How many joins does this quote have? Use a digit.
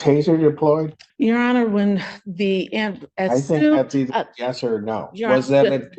1